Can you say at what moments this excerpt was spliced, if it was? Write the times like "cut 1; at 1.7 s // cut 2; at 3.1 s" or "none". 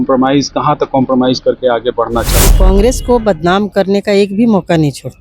cut 1; at 2.4 s

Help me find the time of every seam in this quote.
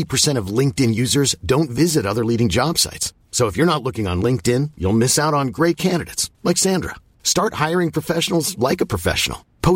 none

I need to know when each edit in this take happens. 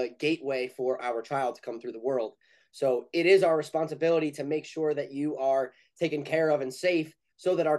none

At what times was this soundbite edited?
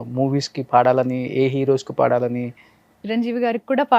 cut 1; at 3.0 s

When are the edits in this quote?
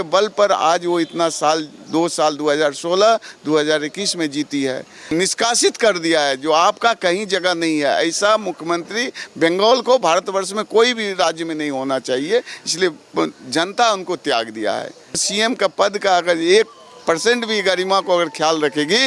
cut 1; at 5.1 s // cut 2; at 15.3 s

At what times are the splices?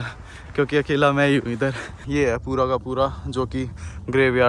cut 1; at 1.9 s

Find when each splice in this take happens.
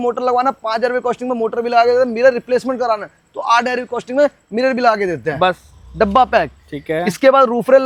none

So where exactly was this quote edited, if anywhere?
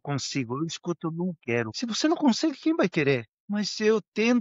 cut 1; at 1.7 s // cut 2; at 3.4 s

